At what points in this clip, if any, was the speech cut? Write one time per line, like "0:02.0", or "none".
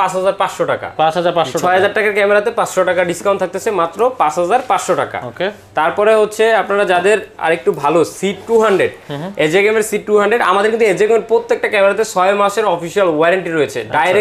none

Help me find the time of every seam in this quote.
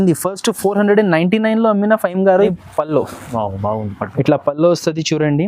0:02.5

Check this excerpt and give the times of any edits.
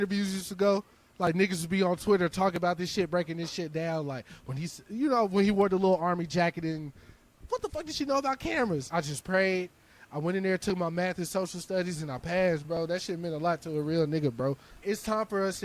0:08.9
0:12.6
0:14.8

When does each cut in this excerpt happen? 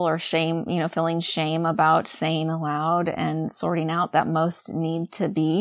none

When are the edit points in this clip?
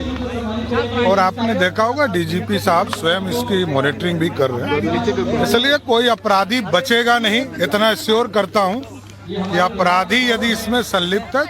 0:01.7

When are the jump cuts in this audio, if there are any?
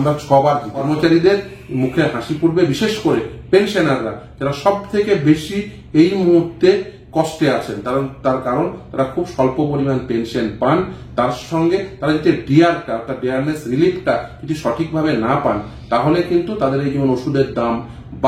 0:00.9

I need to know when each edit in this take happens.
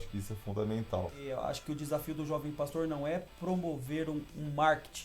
0:01.2

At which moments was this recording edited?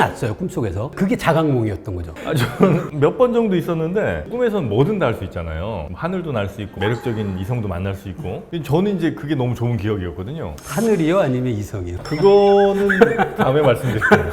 0:04.2
0:06.7

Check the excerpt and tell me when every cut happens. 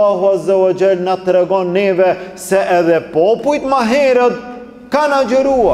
none

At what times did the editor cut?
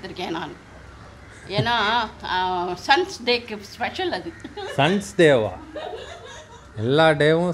none

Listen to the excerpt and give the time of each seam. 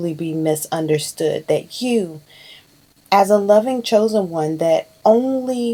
none

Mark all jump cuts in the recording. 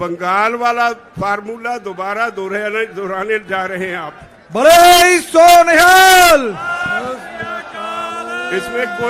none

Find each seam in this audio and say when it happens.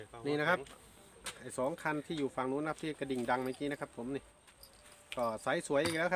none

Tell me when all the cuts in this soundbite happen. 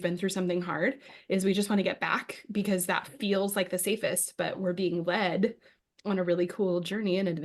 none

